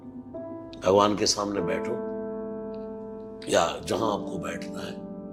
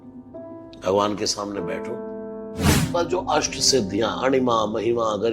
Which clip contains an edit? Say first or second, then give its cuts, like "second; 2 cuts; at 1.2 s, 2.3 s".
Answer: second; 1 cut; at 2.7 s